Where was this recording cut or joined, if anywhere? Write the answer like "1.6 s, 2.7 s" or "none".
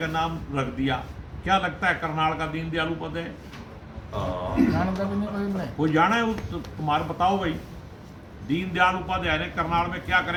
none